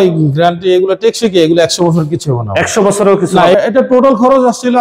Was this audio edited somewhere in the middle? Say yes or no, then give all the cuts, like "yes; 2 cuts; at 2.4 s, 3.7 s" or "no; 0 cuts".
yes; 1 cut; at 3.5 s